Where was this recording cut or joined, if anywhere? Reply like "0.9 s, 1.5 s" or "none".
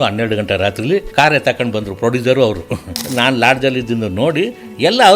1.1 s, 2.9 s